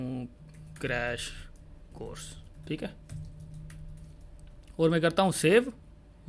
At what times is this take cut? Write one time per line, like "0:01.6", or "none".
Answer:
none